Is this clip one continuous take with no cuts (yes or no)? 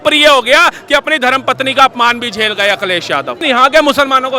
no